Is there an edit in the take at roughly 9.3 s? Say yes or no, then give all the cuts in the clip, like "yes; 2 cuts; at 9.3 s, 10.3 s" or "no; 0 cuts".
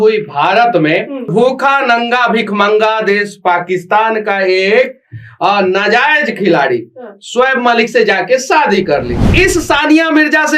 yes; 2 cuts; at 1.3 s, 9.3 s